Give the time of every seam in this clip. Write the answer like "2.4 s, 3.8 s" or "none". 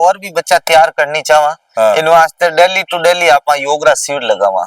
none

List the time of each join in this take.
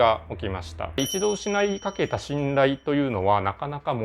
1.0 s

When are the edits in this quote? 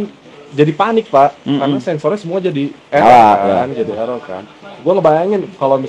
none

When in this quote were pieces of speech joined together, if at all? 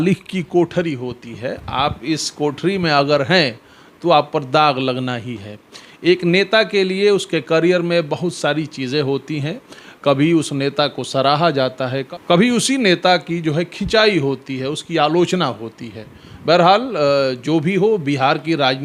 none

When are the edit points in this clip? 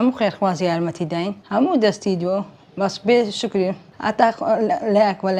1.4 s, 3.9 s

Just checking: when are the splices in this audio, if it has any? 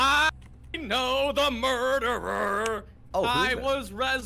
2.9 s

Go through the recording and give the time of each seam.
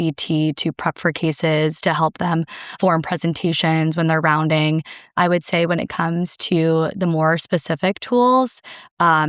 2.7 s, 5.1 s

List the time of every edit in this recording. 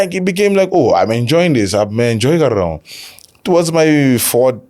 none

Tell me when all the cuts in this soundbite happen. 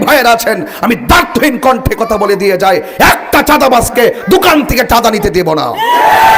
none

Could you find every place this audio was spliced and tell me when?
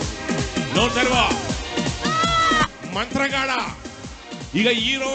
2.7 s

